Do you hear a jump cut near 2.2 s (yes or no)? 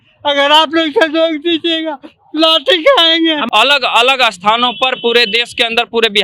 no